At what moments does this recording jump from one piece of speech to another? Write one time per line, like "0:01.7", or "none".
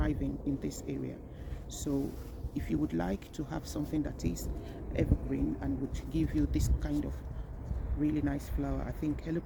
none